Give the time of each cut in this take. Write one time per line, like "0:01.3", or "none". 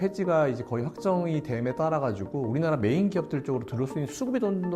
none